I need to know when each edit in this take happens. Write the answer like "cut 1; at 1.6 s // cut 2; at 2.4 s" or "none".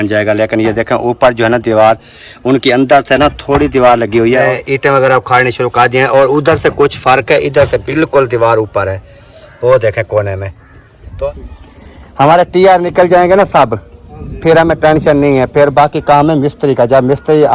cut 1; at 4.5 s // cut 2; at 11.3 s

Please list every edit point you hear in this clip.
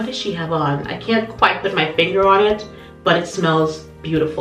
none

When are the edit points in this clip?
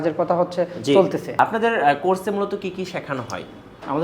cut 1; at 1.4 s

